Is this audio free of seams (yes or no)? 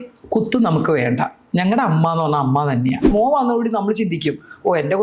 no